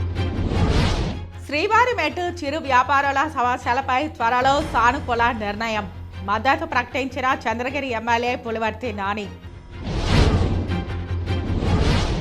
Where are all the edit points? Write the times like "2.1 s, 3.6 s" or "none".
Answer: 1.2 s

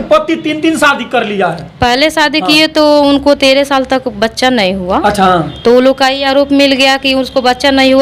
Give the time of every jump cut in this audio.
none

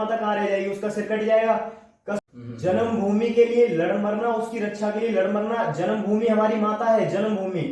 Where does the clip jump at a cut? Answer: 2.1 s

